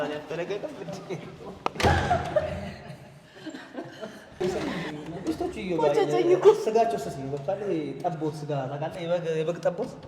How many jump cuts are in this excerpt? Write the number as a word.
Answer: one